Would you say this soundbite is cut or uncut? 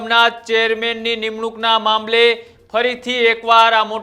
uncut